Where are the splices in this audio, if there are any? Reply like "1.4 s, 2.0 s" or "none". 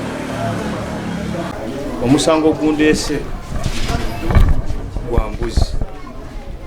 1.7 s